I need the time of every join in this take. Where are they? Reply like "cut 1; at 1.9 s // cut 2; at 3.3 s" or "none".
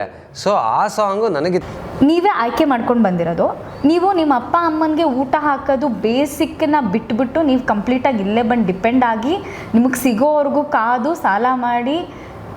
cut 1; at 1.7 s